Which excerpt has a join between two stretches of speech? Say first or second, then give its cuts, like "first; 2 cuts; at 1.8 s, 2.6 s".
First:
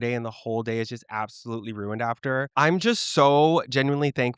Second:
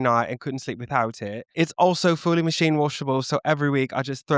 second; 1 cut; at 1.4 s